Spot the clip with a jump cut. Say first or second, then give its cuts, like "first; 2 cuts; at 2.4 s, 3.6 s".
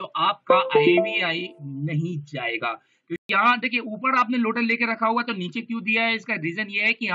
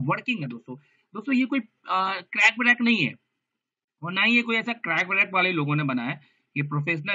first; 1 cut; at 3.3 s